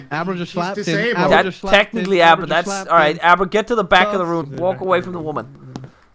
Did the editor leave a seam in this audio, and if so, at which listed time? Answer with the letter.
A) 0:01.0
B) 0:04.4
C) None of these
B